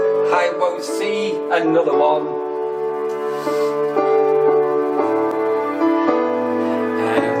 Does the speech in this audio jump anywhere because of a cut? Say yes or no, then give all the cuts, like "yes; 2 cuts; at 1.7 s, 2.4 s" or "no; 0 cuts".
no; 0 cuts